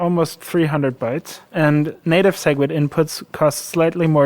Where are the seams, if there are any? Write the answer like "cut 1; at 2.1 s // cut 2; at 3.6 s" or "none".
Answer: cut 1; at 1.4 s